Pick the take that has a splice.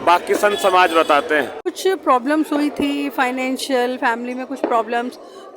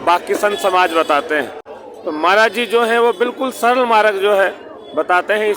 first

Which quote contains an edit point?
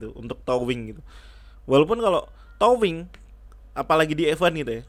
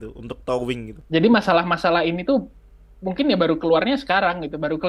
second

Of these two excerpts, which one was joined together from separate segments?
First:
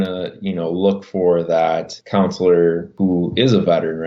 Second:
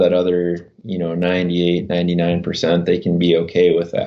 first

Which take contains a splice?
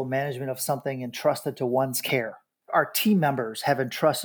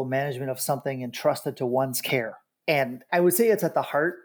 first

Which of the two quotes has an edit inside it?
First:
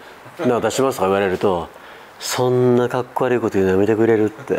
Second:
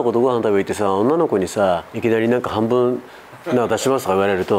second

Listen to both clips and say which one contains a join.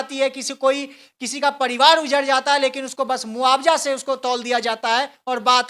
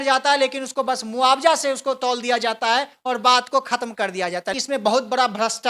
second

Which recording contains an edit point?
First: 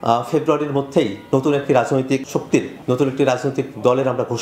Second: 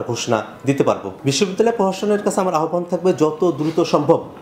second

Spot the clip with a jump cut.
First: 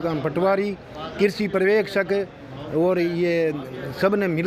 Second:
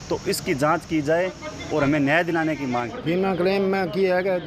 second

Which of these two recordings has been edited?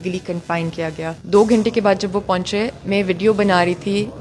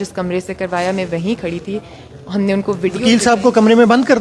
first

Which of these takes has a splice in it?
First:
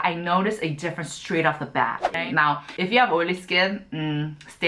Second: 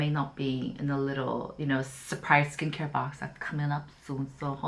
first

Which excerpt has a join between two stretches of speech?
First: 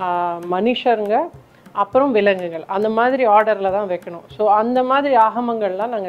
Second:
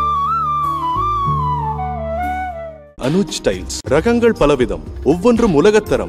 second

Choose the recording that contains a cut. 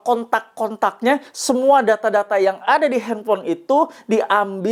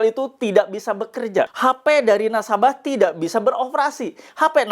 second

